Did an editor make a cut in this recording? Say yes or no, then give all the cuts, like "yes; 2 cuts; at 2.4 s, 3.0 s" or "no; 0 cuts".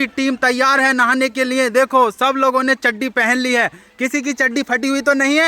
no; 0 cuts